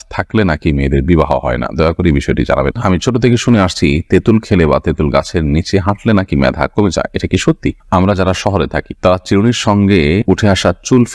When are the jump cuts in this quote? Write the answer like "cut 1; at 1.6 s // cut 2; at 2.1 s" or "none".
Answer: cut 1; at 2.8 s // cut 2; at 7.8 s